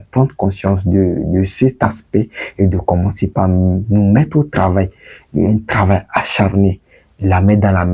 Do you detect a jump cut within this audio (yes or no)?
no